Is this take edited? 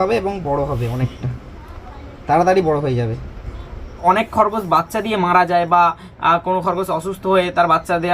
yes; 1 cut; at 4.0 s

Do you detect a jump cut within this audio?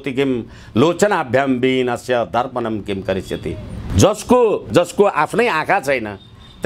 yes; 2 cuts; at 3.8 s, 4.7 s

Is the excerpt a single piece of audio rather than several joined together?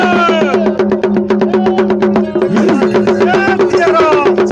yes; 0 cuts

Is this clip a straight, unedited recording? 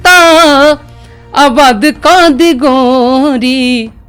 yes; 0 cuts

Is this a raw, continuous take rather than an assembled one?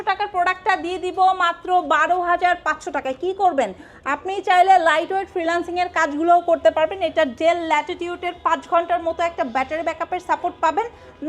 yes; 0 cuts

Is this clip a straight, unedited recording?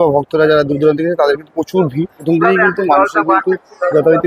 no; 1 cut; at 2.2 s

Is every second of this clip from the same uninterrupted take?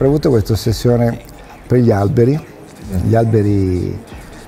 yes; 0 cuts

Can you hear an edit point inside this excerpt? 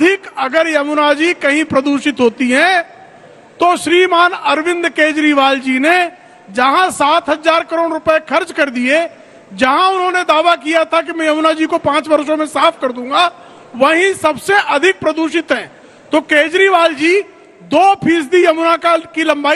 no; 0 cuts

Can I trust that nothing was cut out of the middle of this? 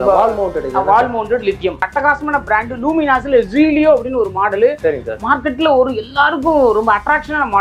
no; 1 cut; at 1.8 s

